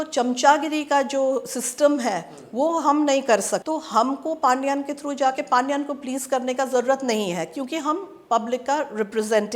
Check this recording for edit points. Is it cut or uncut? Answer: cut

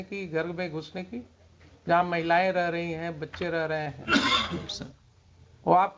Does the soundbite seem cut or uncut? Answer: uncut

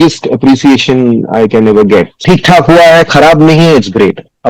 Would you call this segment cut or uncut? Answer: cut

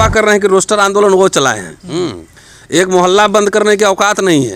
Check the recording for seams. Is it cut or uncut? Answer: uncut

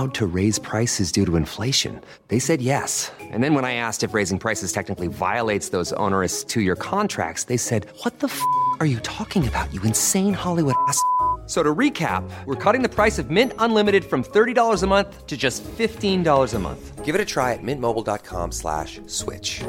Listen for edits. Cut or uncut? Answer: uncut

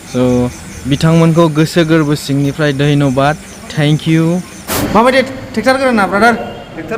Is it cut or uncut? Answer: cut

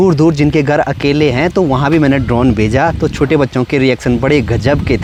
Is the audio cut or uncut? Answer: uncut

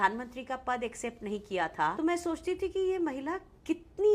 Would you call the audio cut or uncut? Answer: cut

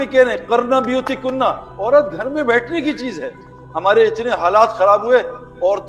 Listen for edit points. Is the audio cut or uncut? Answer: uncut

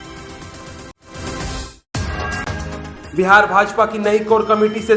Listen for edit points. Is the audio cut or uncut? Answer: uncut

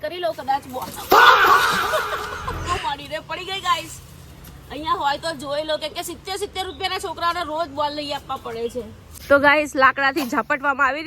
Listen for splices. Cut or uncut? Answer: uncut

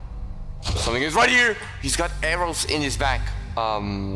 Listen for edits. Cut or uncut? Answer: cut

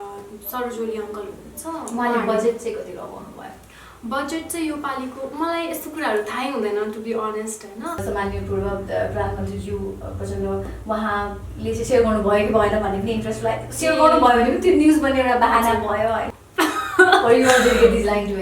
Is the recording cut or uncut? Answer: cut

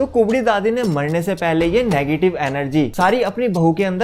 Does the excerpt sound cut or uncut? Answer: cut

